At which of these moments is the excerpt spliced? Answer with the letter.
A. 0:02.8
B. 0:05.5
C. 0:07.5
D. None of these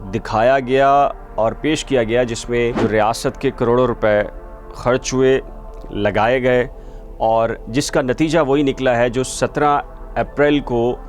A